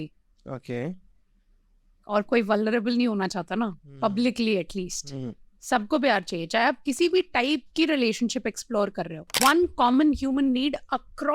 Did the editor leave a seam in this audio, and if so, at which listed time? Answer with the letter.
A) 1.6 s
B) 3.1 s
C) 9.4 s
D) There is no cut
C